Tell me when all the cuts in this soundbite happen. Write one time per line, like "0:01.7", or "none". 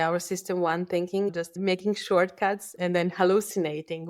0:01.6
0:02.7